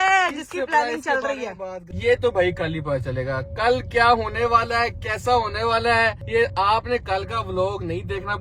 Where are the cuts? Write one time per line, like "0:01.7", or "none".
0:01.9
0:06.2